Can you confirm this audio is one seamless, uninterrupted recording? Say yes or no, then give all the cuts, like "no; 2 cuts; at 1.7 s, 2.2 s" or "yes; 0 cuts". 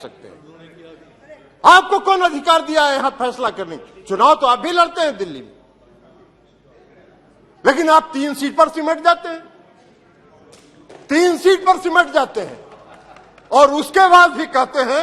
yes; 0 cuts